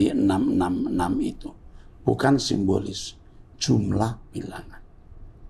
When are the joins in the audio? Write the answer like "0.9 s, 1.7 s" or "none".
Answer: none